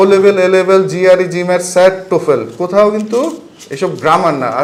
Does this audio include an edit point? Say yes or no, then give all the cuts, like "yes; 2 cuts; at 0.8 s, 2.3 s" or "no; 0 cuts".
no; 0 cuts